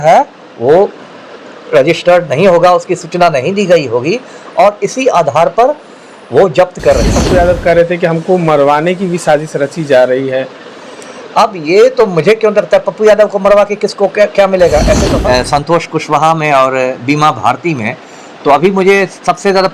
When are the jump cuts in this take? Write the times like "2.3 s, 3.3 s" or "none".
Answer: 7.2 s, 15.1 s